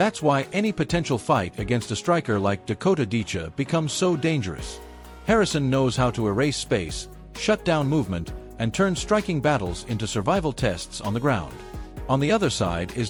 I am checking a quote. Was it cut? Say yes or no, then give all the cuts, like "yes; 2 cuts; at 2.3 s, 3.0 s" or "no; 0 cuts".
no; 0 cuts